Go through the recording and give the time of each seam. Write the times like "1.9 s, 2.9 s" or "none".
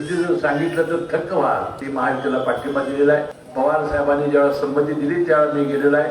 1.8 s, 3.4 s